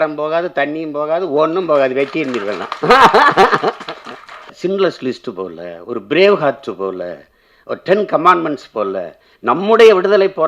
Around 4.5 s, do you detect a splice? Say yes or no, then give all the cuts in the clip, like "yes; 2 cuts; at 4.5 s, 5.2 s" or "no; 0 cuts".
yes; 1 cut; at 4.5 s